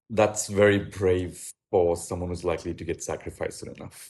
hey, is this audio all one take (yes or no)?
yes